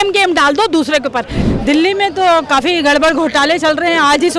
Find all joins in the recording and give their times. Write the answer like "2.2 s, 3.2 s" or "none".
1.4 s